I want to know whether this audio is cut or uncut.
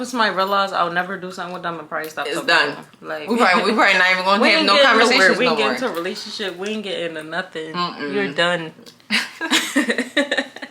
uncut